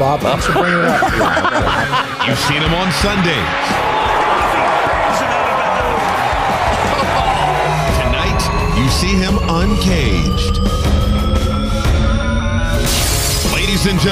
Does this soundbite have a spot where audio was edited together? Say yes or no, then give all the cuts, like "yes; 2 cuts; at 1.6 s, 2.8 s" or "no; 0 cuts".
yes; 1 cut; at 2.9 s